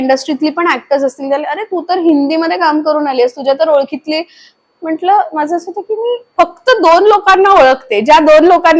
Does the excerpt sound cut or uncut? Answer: uncut